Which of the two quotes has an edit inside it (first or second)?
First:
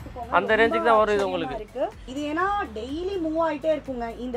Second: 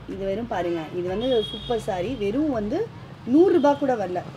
first